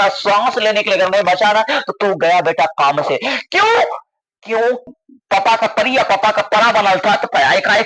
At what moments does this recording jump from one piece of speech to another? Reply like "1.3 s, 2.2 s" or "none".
4.9 s